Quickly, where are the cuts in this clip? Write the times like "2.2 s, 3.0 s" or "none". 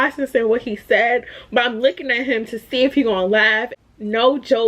3.7 s

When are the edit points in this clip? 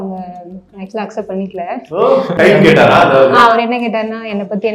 2.3 s, 3.5 s

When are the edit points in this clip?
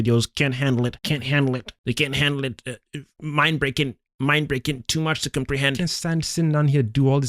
5.8 s

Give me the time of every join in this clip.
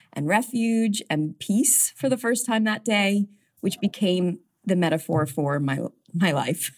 1.4 s, 4.5 s

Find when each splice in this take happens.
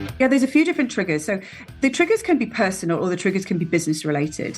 1.7 s

